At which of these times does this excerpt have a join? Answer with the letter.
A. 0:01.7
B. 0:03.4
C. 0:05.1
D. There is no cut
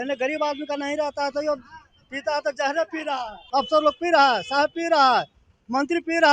B